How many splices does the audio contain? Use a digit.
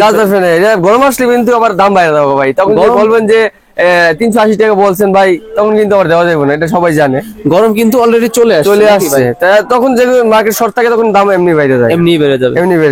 0